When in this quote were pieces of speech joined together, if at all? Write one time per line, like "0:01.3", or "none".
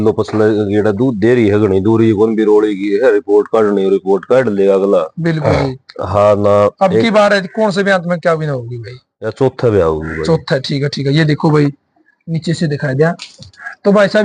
none